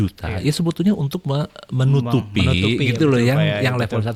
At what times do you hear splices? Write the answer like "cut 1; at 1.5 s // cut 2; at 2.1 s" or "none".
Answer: none